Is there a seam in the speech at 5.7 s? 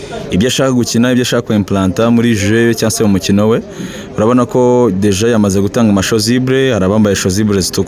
no; 0 cuts

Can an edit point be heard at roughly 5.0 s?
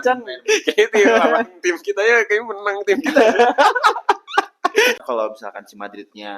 yes; 1 cut; at 5.0 s

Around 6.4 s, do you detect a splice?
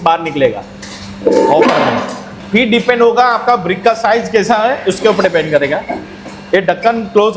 no; 1 cut; at 2.3 s

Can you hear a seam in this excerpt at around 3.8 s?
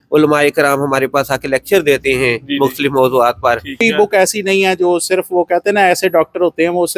yes; 1 cut; at 3.8 s

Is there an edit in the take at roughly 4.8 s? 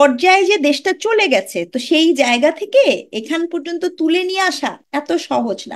yes; 1 cut; at 4.8 s

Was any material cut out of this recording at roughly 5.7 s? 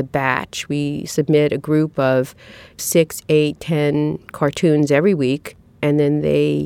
yes; 1 cut; at 5.7 s

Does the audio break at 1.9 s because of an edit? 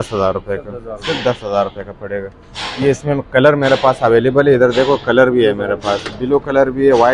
no; 0 cuts

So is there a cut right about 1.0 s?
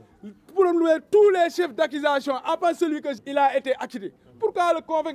no; 1 cut; at 3.1 s

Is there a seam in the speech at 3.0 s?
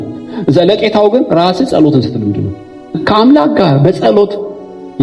yes; 1 cut; at 3.0 s

